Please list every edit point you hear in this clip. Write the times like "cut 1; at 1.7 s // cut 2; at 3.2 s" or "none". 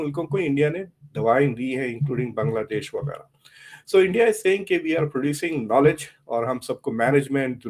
none